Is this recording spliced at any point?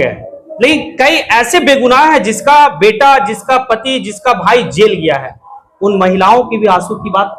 no; 0 cuts

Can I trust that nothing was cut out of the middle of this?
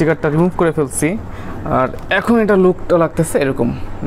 yes; 0 cuts

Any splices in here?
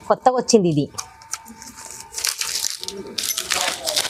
no; 0 cuts

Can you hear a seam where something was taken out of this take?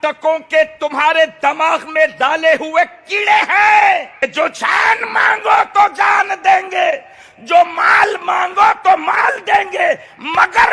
yes; 1 cut; at 4.2 s

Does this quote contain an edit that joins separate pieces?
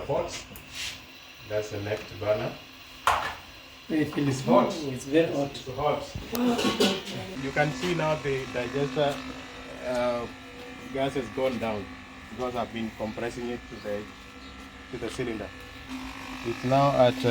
yes; 2 cuts; at 7.2 s, 15.8 s

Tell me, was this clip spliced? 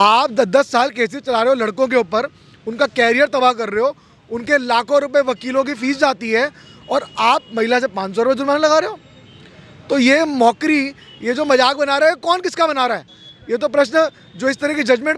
no; 0 cuts

